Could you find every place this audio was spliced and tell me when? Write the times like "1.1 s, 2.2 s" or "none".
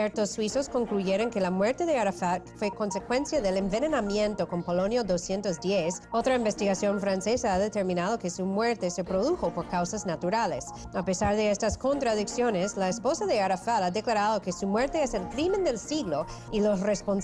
9.3 s